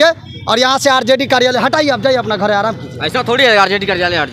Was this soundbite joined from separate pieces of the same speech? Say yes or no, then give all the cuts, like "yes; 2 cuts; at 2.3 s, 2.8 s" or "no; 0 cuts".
no; 0 cuts